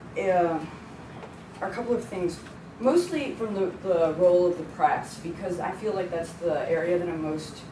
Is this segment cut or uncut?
uncut